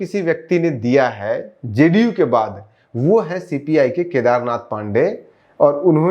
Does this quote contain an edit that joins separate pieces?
no; 0 cuts

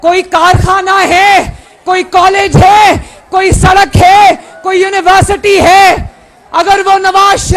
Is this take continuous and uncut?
yes; 0 cuts

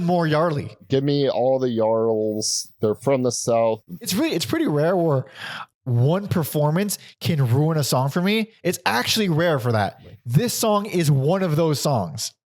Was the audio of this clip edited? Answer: yes; 1 cut; at 4.1 s

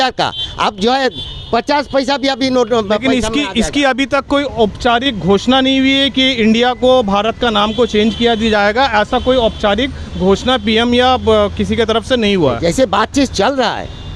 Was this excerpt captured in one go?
yes; 0 cuts

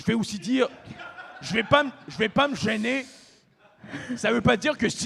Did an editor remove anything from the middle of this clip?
no; 0 cuts

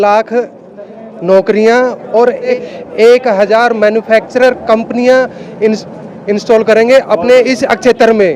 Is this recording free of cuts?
no; 1 cut; at 2.5 s

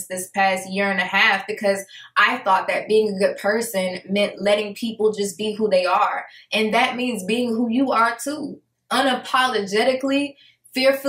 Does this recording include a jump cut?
no; 0 cuts

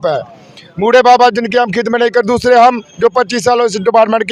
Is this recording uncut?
yes; 0 cuts

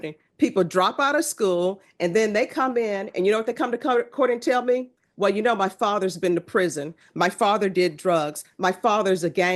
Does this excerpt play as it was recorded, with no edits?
yes; 0 cuts

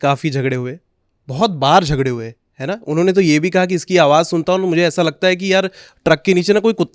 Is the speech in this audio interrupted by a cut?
no; 0 cuts

